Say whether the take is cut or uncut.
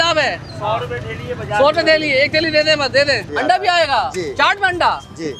cut